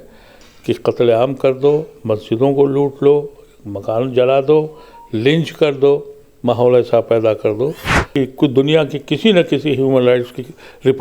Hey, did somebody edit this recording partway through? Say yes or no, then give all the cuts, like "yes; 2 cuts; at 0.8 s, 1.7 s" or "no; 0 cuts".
yes; 1 cut; at 8.0 s